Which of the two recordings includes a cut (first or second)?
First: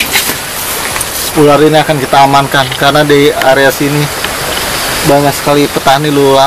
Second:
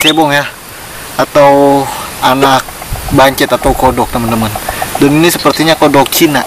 first